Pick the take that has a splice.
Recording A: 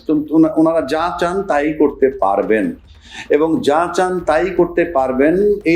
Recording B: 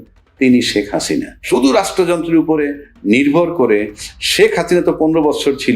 B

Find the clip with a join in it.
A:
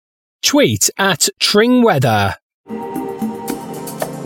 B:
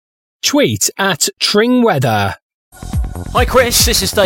B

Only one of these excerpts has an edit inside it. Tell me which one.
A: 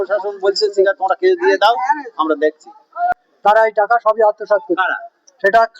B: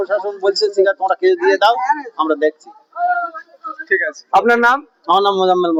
A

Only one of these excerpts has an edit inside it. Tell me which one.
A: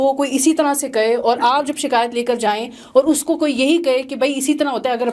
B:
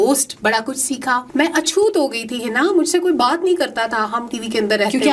B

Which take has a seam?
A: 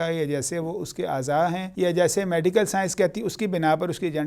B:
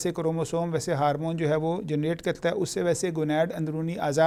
A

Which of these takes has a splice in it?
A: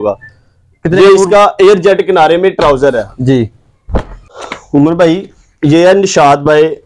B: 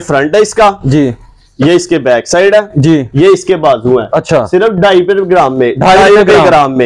A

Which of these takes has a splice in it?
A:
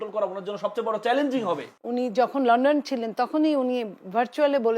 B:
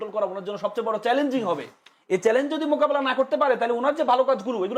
A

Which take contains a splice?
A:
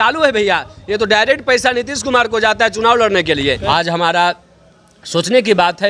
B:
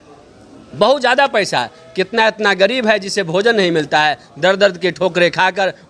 A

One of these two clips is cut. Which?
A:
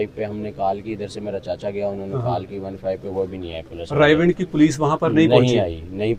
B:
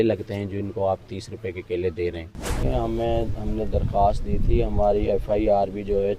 B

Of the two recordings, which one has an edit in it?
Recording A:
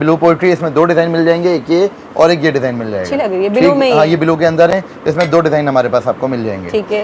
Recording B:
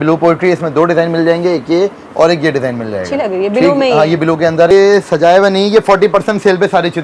B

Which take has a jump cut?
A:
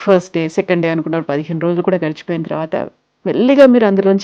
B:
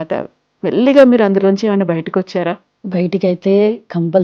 B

